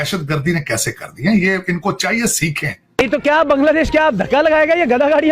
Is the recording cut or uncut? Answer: cut